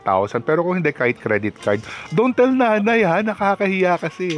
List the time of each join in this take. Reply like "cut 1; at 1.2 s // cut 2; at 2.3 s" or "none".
none